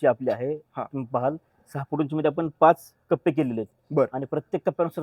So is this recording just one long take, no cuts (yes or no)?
yes